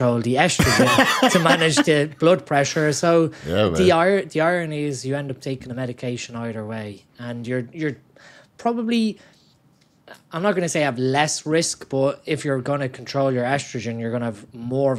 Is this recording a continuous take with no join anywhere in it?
yes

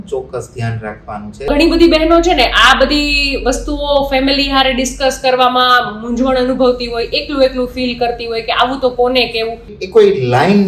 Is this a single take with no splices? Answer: no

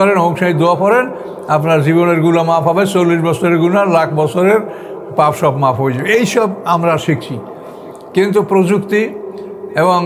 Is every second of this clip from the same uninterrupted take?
yes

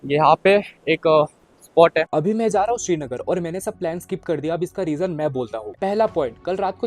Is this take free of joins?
no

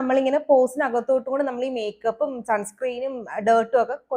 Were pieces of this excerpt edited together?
no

